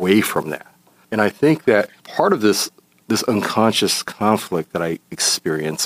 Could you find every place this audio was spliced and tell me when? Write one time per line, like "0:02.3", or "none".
none